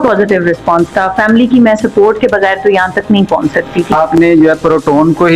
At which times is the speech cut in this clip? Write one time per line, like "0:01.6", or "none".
0:03.9